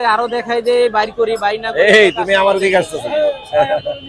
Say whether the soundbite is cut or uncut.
uncut